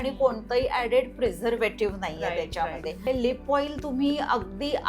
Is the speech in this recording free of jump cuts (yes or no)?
no